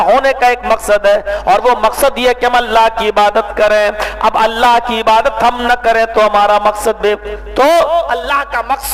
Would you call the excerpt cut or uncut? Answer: uncut